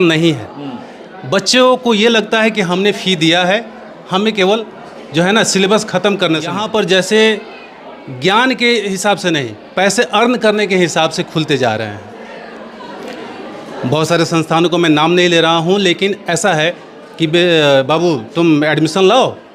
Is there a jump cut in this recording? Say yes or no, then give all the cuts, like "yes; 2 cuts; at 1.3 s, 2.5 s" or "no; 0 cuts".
yes; 1 cut; at 6.6 s